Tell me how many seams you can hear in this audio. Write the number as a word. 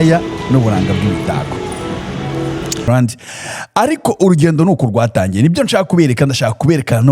one